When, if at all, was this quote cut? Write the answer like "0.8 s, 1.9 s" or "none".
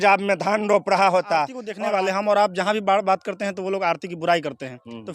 1.6 s